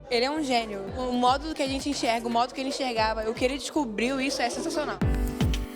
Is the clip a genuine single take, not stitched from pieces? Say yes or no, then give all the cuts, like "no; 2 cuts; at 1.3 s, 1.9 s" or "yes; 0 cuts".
no; 2 cuts; at 1.0 s, 5.0 s